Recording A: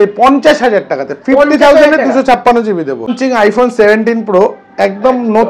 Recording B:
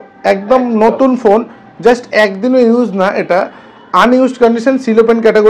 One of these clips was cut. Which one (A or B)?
A